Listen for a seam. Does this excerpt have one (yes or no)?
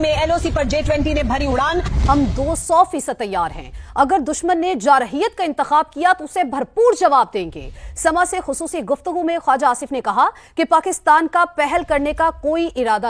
yes